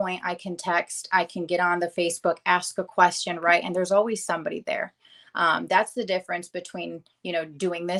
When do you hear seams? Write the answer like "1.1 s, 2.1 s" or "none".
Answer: none